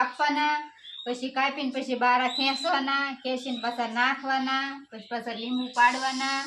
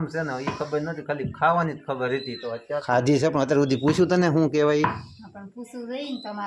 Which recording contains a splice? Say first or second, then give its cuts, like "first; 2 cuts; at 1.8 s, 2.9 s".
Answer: second; 1 cut; at 2.8 s